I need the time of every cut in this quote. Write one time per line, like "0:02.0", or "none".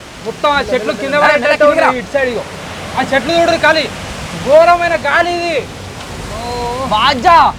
none

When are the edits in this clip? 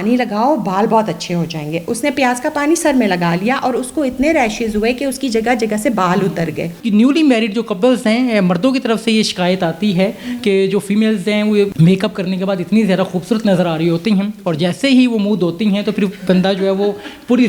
0:06.7
0:11.7

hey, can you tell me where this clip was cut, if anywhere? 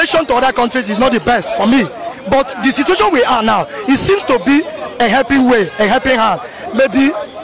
none

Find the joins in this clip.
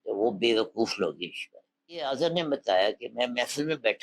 0:02.0

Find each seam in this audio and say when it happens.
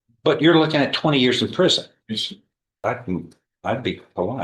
0:02.8

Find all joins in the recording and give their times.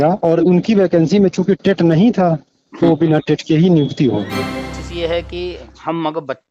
0:04.8

